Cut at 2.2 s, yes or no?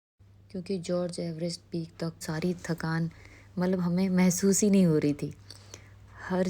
yes